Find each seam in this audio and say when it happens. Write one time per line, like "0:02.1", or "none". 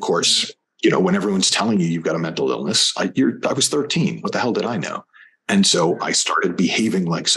none